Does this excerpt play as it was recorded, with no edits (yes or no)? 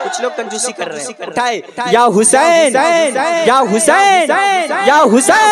yes